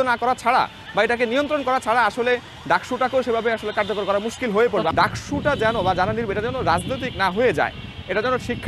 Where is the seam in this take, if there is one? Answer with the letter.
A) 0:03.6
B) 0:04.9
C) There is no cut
B